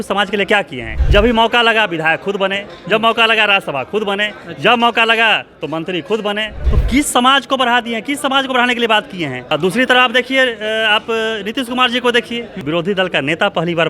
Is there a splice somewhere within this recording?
yes; 4 cuts; at 0.9 s, 6.6 s, 9.4 s, 12.5 s

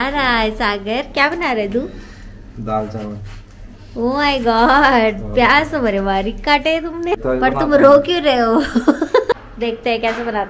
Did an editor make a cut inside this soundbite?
yes; 2 cuts; at 7.1 s, 9.4 s

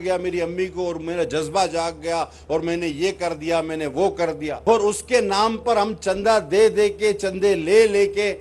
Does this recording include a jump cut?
yes; 1 cut; at 4.6 s

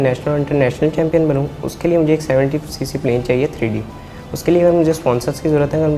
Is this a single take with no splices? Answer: yes; 0 cuts

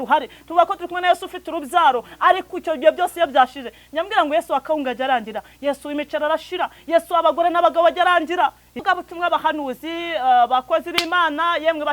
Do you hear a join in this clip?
yes; 1 cut; at 8.8 s

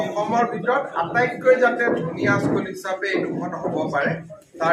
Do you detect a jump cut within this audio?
no; 0 cuts

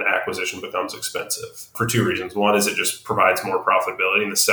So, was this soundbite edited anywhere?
yes; 1 cut; at 1.7 s

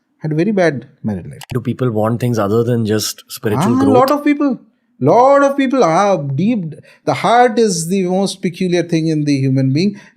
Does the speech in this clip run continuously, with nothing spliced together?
no; 1 cut; at 1.5 s

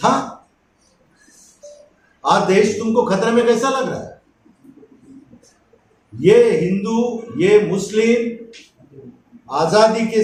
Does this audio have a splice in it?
no; 0 cuts

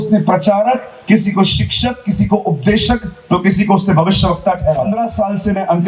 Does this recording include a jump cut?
yes; 1 cut; at 4.9 s

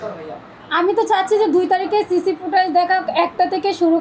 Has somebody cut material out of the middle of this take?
no; 0 cuts

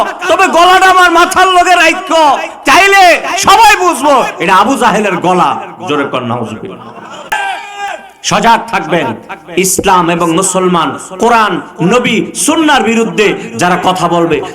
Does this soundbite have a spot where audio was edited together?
yes; 1 cut; at 7.3 s

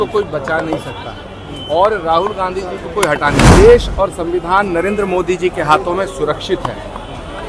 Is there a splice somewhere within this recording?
yes; 1 cut; at 3.6 s

